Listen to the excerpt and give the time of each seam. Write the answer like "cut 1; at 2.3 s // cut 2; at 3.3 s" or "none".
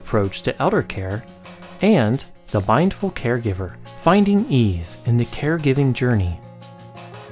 cut 1; at 6.4 s